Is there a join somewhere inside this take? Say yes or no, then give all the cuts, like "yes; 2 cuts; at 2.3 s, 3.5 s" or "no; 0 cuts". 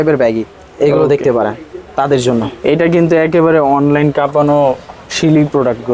no; 0 cuts